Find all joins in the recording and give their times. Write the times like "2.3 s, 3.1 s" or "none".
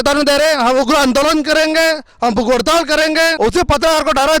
3.3 s